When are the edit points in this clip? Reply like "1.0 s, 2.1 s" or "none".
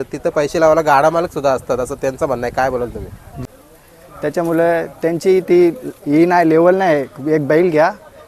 3.3 s